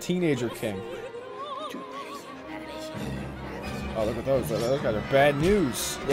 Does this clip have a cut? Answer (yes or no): no